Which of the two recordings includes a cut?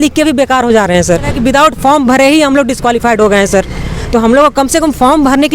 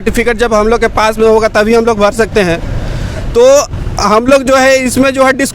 first; 1 cut; at 1.3 s

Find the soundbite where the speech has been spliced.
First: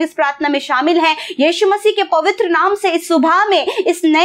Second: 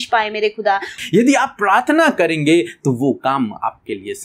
second; 1 cut; at 0.9 s

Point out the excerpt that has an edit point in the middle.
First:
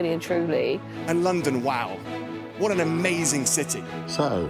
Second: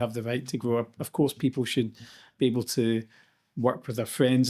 second; 1 cut; at 2.3 s

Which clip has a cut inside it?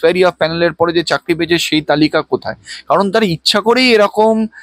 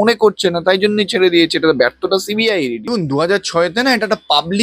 second; 1 cut; at 2.9 s

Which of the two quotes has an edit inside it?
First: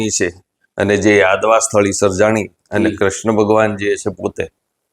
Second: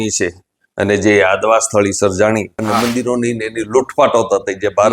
second; 1 cut; at 2.5 s

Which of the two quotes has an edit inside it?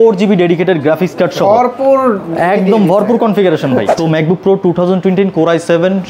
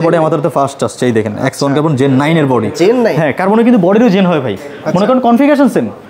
first; 1 cut; at 3.9 s

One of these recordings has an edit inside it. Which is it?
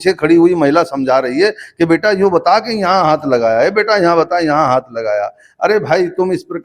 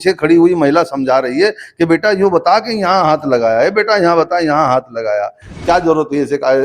second; 1 cut; at 5.5 s

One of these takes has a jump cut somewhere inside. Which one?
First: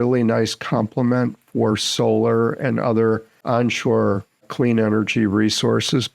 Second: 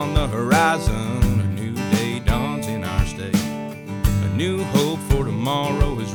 first; 1 cut; at 3.3 s

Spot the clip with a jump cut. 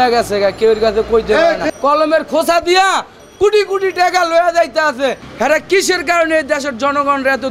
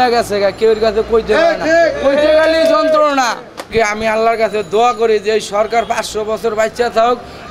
first; 2 cuts; at 1.6 s, 5.3 s

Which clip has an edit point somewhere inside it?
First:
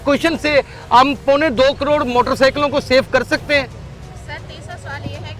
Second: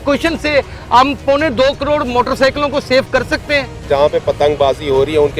second; 1 cut; at 3.9 s

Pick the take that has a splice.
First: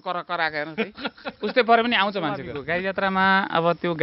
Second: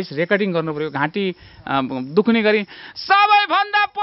first; 1 cut; at 2.5 s

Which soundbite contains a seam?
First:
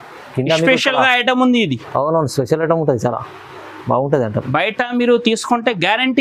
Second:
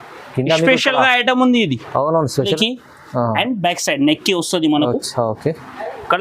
second; 1 cut; at 2.5 s

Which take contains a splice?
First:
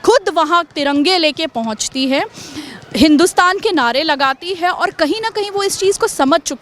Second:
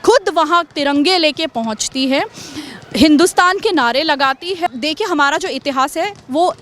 second; 1 cut; at 4.7 s

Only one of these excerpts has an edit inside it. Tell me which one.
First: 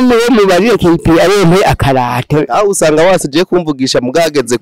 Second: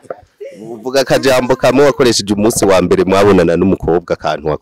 first; 1 cut; at 2.5 s

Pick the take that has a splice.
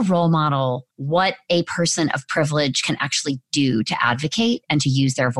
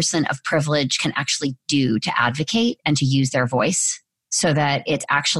first; 1 cut; at 0.9 s

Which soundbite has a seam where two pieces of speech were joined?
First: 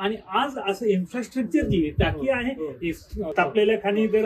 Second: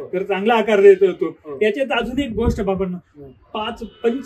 first; 1 cut; at 3.3 s

